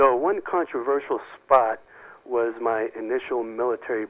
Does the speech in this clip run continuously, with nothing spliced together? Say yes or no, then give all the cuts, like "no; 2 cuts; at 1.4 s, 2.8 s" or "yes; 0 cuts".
yes; 0 cuts